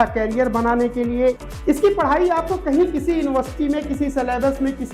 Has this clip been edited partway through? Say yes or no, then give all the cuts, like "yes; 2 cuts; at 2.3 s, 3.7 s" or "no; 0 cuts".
yes; 1 cut; at 1.4 s